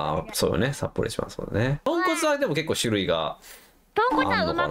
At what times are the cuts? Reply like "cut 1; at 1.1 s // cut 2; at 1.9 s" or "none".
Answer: cut 1; at 1.9 s